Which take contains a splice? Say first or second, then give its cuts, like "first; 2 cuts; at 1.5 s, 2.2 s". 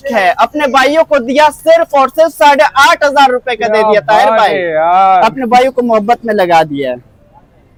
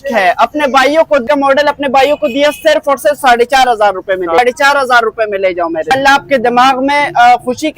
second; 3 cuts; at 1.2 s, 4.4 s, 5.9 s